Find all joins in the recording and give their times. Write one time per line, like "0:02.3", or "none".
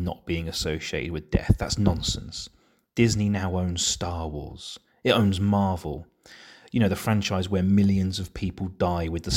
none